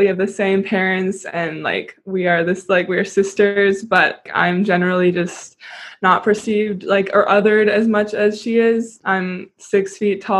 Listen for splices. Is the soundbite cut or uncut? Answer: cut